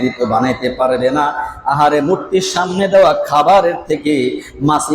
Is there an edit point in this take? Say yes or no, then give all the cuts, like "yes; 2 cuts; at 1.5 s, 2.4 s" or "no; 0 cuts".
no; 0 cuts